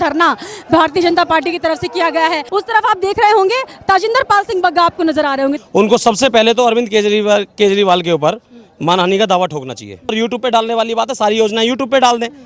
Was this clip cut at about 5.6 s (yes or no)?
yes